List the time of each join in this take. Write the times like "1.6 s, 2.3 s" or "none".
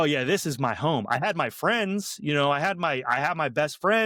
none